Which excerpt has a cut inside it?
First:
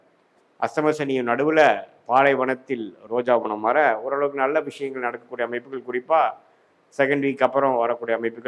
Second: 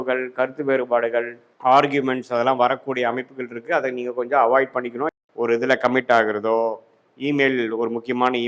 second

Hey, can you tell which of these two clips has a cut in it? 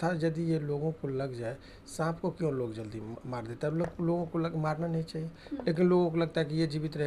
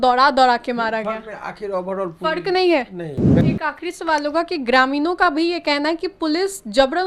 second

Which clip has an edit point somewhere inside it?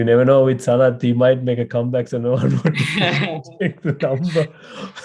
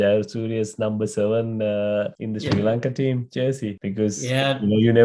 second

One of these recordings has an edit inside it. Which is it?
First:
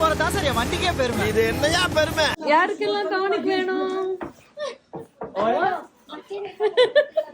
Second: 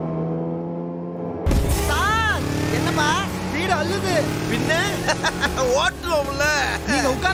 first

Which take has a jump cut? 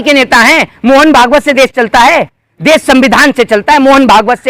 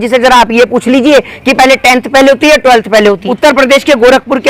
second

